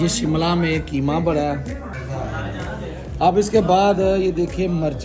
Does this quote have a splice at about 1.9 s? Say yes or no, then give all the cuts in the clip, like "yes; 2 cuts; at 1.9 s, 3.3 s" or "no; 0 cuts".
yes; 1 cut; at 1.9 s